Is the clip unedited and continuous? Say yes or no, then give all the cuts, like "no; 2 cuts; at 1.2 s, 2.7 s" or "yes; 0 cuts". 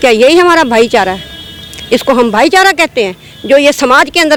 yes; 0 cuts